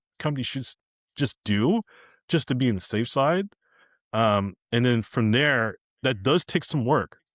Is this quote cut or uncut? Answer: uncut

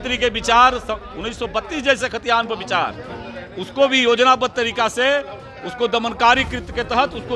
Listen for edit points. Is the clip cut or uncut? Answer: uncut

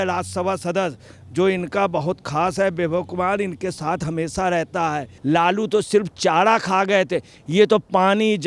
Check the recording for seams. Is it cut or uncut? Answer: cut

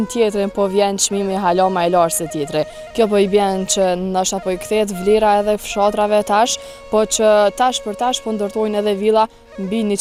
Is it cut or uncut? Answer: uncut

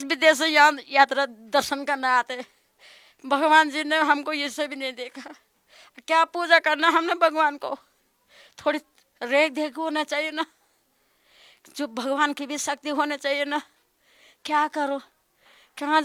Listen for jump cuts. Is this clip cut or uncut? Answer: uncut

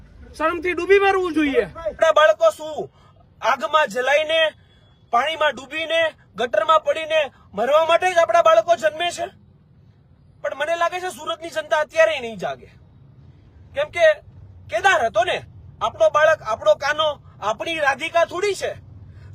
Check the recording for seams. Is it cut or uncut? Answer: cut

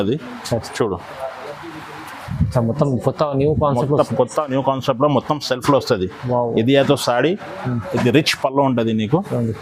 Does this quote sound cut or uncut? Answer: uncut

